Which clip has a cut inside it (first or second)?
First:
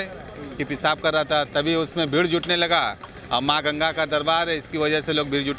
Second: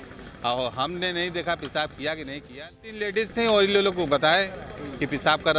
second